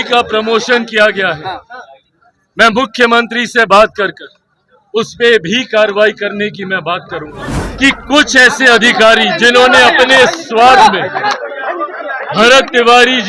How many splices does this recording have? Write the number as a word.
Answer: one